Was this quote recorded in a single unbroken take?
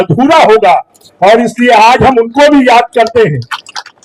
yes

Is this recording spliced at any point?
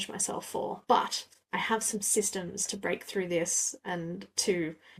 no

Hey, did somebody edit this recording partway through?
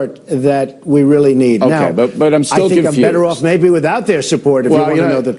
yes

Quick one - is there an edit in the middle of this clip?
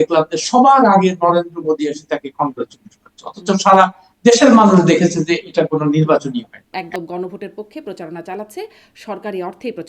yes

